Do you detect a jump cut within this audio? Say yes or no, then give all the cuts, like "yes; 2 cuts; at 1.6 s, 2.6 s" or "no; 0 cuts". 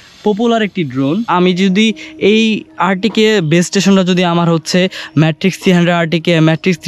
yes; 1 cut; at 1.2 s